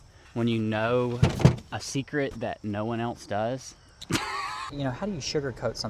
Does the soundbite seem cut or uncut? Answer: cut